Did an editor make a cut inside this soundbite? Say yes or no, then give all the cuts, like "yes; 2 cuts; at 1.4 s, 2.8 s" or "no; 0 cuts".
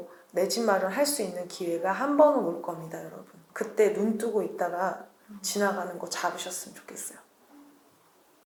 no; 0 cuts